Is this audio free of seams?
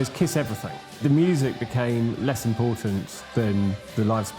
no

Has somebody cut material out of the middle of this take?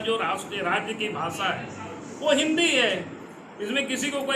no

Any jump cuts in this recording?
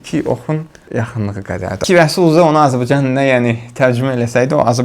yes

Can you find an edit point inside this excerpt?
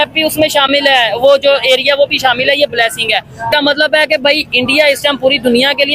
yes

